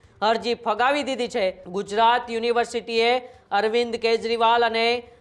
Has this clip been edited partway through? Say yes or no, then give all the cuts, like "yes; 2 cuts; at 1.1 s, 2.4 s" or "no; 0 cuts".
yes; 1 cut; at 1.7 s